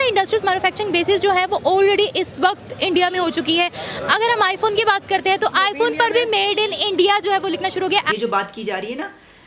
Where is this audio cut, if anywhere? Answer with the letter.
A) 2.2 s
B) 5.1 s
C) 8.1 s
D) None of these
C